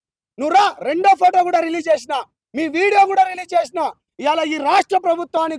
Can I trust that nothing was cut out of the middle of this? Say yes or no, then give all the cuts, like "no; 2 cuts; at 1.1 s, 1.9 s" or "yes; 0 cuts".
no; 1 cut; at 4.1 s